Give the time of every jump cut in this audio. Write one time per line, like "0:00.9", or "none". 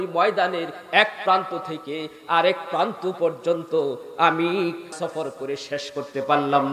0:04.9